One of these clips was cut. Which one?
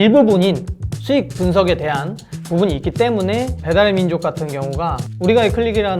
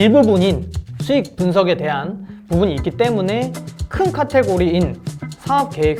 first; 2 cuts; at 3.6 s, 5.0 s

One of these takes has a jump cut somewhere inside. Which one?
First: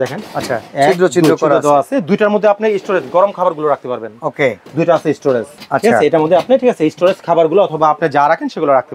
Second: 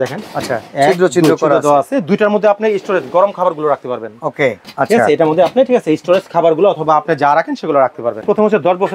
second; 2 cuts; at 4.6 s, 8.2 s

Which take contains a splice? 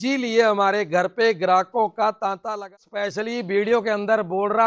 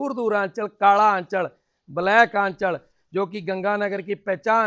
first; 1 cut; at 2.6 s

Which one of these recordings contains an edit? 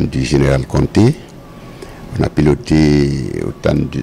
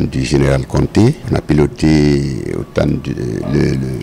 second; 1 cut; at 1.2 s

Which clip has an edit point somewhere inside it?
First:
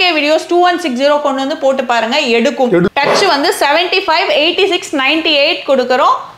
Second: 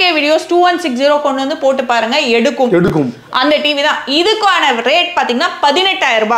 first; 1 cut; at 2.9 s

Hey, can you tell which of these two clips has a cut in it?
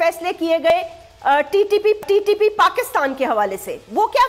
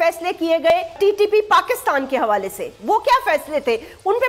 second; 1 cut; at 0.9 s

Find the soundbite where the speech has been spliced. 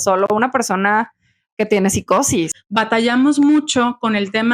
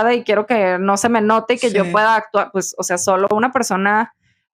first; 1 cut; at 2.5 s

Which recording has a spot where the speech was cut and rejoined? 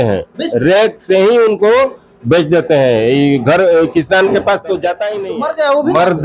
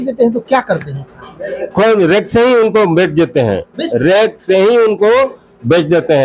first; 1 cut; at 5.1 s

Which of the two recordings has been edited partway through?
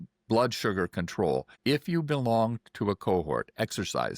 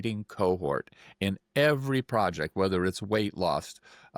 first; 1 cut; at 1.5 s

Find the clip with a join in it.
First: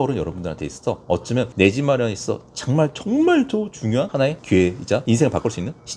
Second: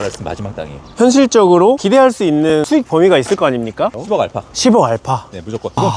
second; 2 cuts; at 0.9 s, 3.9 s

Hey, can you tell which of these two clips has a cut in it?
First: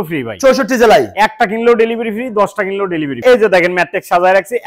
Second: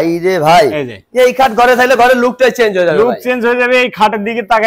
first; 1 cut; at 3.2 s

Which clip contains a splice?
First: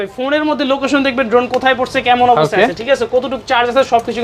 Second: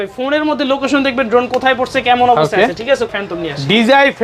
second; 1 cut; at 3.1 s

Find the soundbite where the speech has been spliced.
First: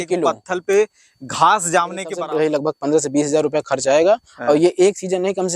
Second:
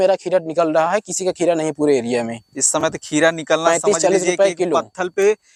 first; 1 cut; at 2.1 s

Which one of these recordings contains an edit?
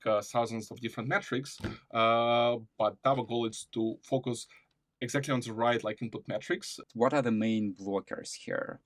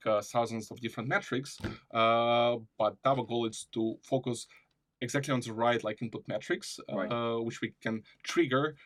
first; 1 cut; at 6.8 s

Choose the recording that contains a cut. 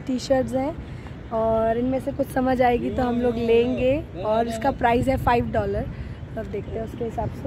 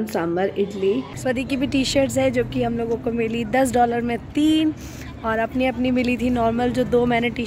second; 1 cut; at 1.2 s

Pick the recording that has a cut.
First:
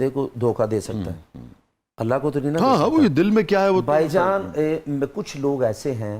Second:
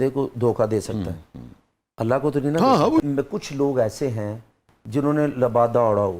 second; 1 cut; at 3.0 s

